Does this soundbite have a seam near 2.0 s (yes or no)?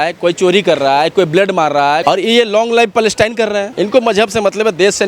yes